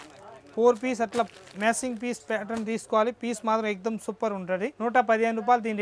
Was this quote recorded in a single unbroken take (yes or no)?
no